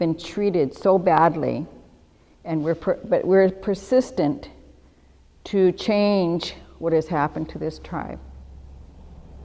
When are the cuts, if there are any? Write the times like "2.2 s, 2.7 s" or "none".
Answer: 3.0 s

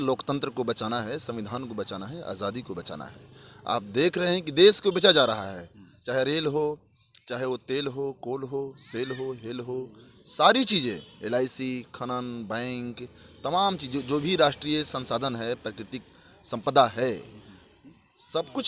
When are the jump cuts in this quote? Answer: none

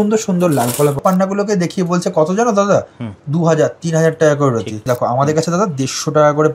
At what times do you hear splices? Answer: 1.0 s, 4.8 s

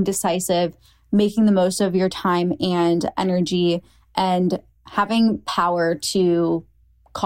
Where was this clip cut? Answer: none

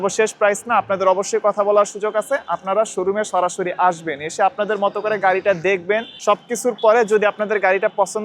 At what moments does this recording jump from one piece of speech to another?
6.1 s

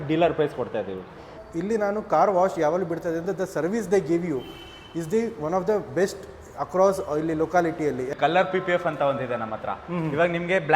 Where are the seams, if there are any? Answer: 1.3 s, 8.1 s

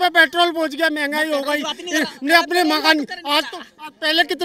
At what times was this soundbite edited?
none

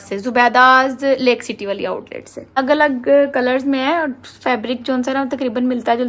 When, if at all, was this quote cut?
2.6 s

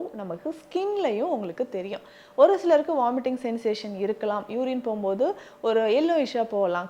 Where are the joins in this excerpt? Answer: none

